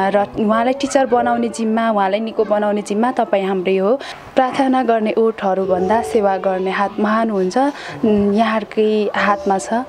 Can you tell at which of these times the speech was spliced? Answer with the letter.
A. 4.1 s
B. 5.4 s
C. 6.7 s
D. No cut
A